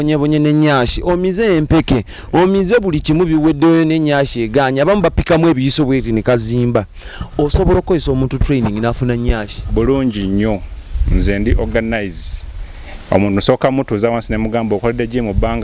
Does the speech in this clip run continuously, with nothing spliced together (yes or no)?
yes